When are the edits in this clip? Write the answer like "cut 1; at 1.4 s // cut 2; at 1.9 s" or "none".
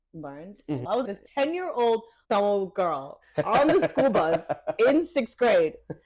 cut 1; at 1.1 s // cut 2; at 2.1 s